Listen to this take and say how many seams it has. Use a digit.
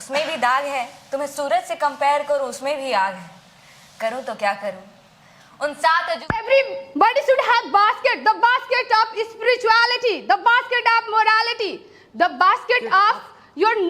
1